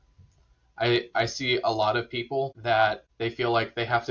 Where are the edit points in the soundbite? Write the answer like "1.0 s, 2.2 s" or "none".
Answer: 2.6 s, 3.1 s